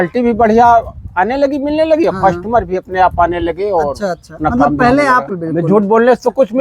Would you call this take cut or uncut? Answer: cut